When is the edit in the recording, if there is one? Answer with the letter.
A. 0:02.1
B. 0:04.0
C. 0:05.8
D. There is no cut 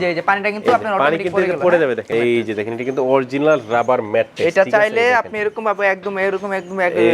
A